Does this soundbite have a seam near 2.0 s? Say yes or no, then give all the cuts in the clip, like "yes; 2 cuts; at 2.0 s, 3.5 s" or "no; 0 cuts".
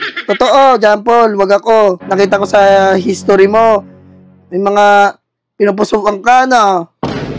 yes; 1 cut; at 2.0 s